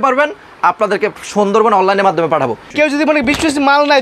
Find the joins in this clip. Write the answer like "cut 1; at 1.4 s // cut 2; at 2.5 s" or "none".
cut 1; at 2.7 s